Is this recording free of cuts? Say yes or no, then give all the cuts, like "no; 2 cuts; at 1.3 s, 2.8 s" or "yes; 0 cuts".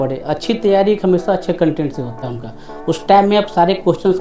no; 1 cut; at 2.2 s